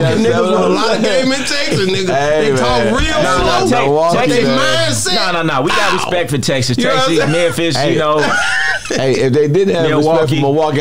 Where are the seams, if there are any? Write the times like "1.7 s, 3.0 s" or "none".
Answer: none

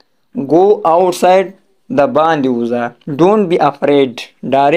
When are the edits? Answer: 3.0 s

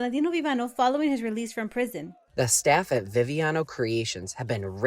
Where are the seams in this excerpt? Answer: 2.2 s

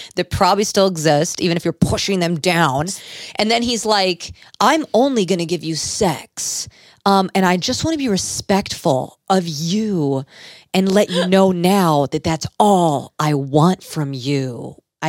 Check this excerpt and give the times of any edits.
none

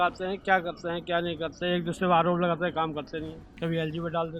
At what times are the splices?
3.4 s

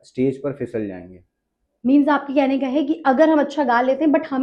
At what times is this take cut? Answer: none

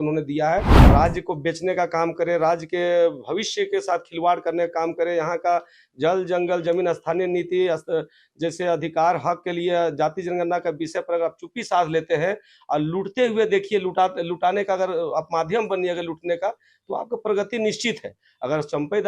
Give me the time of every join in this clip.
0.9 s

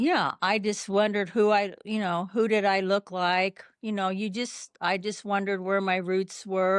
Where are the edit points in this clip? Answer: none

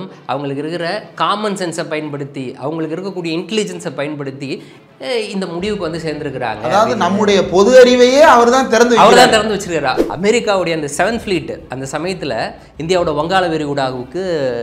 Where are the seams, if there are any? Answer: 10.0 s

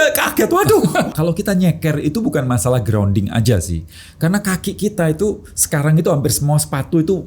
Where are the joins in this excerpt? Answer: 1.1 s

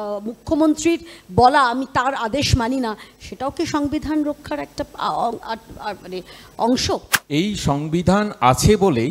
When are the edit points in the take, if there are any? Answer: 7.1 s

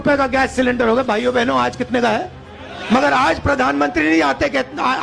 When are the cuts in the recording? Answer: 2.9 s

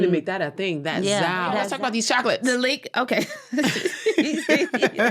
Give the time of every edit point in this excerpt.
1.7 s

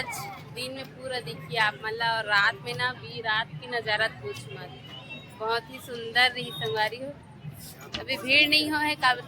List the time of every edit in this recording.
none

